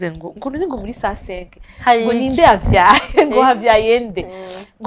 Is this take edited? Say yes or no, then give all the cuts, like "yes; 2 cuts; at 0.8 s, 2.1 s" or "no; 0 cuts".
no; 0 cuts